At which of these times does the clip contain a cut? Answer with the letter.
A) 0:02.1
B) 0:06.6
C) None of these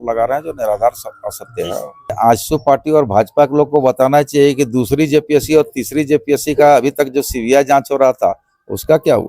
A